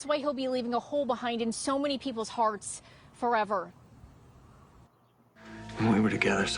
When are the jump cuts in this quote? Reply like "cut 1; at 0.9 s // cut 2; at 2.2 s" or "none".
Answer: cut 1; at 5.2 s

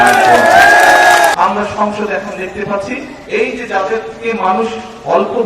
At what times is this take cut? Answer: cut 1; at 1.4 s

